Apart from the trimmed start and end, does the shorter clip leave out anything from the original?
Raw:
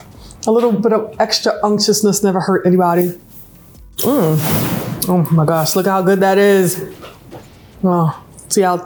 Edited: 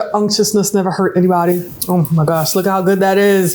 yes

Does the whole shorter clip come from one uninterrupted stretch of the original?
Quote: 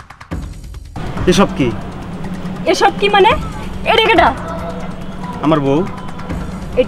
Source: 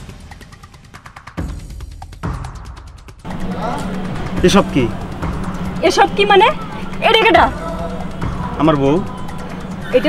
no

